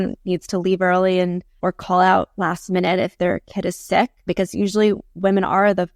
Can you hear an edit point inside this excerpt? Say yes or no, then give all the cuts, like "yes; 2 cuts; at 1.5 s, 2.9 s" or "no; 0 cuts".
yes; 2 cuts; at 1.5 s, 4.2 s